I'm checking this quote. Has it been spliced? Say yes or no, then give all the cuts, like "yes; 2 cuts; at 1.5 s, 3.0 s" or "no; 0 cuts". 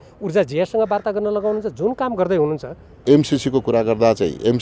yes; 1 cut; at 3.0 s